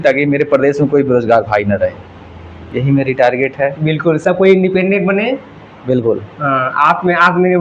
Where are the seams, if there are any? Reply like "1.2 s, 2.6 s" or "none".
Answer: none